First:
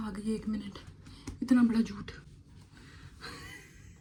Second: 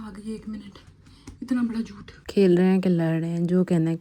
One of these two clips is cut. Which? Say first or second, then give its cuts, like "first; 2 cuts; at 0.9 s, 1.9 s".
second; 1 cut; at 2.1 s